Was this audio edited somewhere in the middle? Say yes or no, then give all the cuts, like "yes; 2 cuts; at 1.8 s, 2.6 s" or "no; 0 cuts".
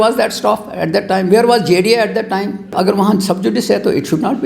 yes; 1 cut; at 2.7 s